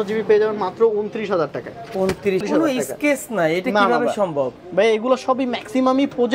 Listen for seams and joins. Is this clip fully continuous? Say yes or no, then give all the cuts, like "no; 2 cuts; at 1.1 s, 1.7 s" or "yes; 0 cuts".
no; 1 cut; at 2.4 s